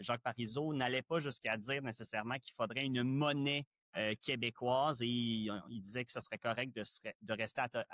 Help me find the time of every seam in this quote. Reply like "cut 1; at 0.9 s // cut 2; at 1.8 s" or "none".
none